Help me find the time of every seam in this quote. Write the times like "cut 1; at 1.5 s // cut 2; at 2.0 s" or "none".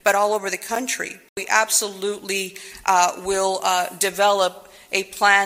cut 1; at 1.4 s